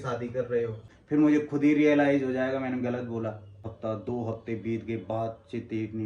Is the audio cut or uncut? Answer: cut